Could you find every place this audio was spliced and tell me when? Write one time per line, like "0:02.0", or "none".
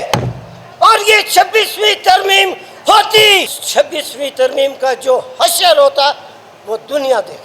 0:03.6